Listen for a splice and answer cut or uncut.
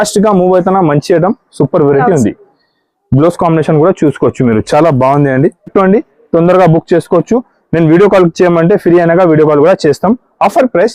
cut